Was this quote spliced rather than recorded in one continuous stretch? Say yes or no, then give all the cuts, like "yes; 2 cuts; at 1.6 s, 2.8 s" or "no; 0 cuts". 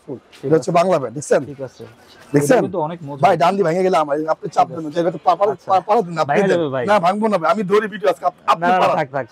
no; 0 cuts